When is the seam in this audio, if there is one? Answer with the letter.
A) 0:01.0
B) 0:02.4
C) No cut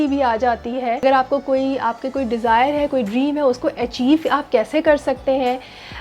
A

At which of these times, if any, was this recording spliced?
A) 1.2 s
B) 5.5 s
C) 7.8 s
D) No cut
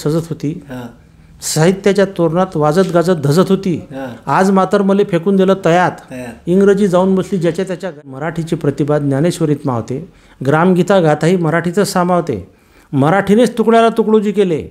C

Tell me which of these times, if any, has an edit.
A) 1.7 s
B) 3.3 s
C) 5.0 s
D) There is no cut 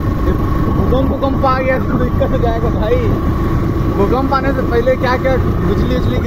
D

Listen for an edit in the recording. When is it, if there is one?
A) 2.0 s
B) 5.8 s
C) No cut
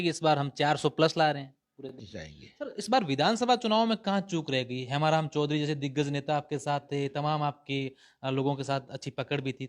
A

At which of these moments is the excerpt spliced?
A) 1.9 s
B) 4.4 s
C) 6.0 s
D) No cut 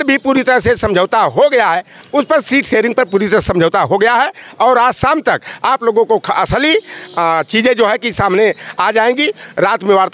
A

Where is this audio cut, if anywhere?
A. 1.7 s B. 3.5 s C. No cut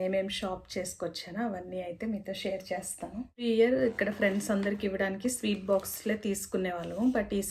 B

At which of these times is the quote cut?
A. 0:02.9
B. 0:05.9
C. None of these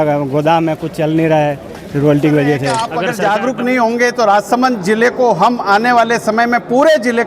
A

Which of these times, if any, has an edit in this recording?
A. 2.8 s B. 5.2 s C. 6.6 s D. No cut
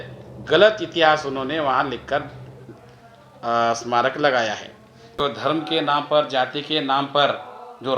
B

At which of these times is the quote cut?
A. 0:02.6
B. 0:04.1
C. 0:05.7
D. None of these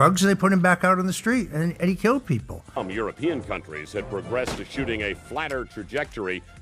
A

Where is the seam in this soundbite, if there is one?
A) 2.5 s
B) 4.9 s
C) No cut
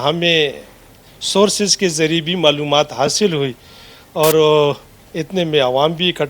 B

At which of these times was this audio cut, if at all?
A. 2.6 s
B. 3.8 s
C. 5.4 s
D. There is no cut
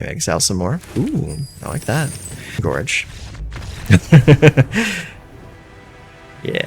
A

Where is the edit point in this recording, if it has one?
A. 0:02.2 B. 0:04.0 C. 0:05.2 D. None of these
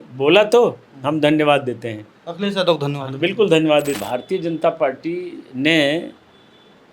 B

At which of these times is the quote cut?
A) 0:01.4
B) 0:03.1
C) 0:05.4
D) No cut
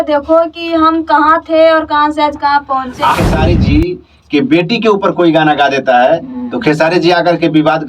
B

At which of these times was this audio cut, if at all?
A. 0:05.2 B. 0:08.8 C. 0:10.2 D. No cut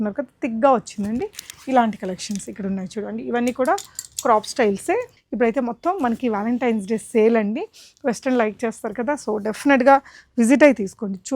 A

